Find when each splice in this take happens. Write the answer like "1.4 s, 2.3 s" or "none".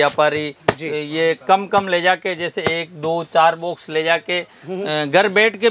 none